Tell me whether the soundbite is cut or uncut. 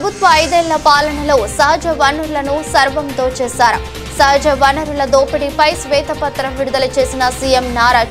uncut